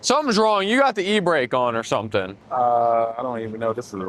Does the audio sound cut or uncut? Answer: cut